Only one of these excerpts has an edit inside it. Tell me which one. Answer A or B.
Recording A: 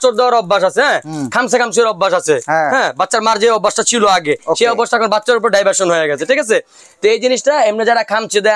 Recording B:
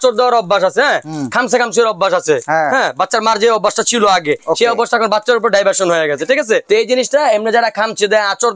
B